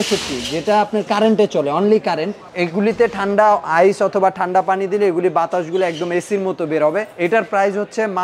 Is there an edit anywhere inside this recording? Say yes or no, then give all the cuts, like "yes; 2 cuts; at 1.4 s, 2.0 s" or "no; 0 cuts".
no; 0 cuts